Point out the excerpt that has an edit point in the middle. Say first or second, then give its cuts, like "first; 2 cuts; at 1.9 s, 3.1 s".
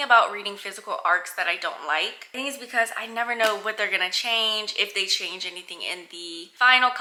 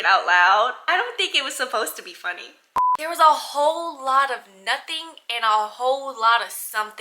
second; 1 cut; at 2.8 s